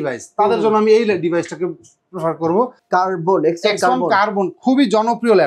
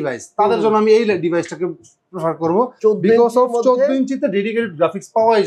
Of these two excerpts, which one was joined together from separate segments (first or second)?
first